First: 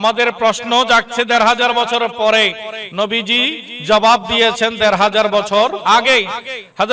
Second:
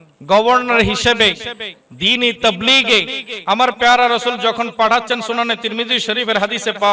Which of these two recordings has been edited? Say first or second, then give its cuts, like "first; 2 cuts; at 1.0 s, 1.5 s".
first; 1 cut; at 5.8 s